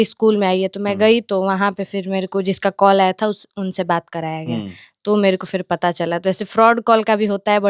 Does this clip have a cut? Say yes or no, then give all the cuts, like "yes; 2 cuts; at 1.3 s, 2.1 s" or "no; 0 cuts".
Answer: no; 0 cuts